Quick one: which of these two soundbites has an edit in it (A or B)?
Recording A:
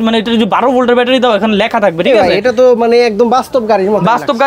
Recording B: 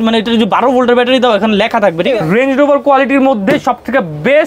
B